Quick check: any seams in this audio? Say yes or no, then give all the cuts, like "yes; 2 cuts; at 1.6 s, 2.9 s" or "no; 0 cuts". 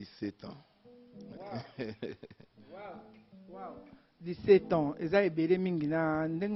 no; 0 cuts